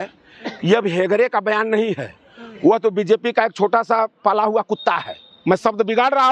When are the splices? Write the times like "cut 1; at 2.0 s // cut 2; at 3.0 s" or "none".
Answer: none